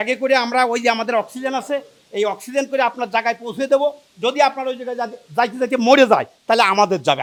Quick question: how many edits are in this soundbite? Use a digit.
0